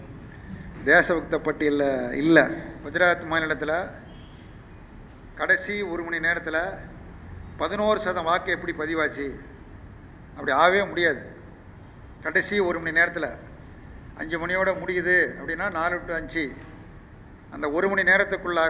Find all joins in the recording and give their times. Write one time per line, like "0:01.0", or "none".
0:02.8